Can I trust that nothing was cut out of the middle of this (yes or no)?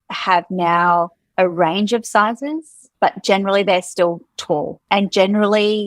no